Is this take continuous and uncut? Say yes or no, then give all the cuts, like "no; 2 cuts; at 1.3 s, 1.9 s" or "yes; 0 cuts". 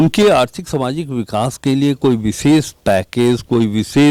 yes; 0 cuts